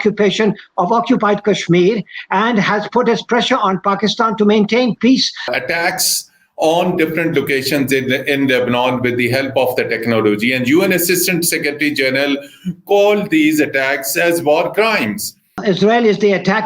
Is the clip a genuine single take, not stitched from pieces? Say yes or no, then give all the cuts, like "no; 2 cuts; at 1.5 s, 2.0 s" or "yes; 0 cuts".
no; 2 cuts; at 5.5 s, 15.5 s